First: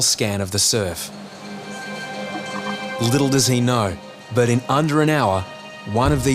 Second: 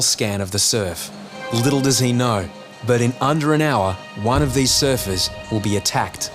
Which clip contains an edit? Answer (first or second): second